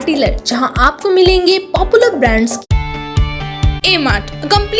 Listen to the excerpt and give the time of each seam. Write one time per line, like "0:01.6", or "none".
0:02.6